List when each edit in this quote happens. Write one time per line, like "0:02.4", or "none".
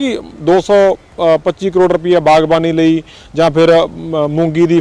none